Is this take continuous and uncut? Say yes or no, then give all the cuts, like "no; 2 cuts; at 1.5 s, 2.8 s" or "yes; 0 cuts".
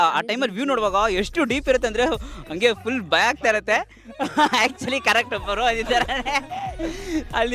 yes; 0 cuts